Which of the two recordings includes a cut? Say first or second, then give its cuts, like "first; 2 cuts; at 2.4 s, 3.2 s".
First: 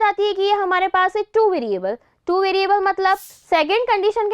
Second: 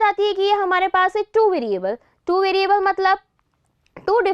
first; 1 cut; at 3.3 s